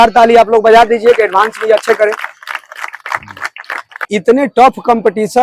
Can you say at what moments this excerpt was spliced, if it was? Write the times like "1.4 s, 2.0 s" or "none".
4.1 s